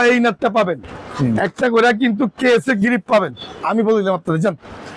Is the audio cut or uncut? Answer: uncut